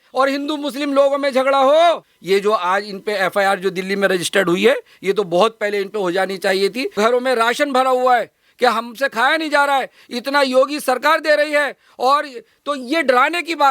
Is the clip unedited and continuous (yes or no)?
no